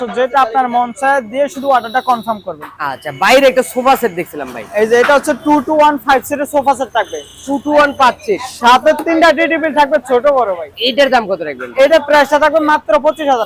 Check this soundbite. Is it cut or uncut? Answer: uncut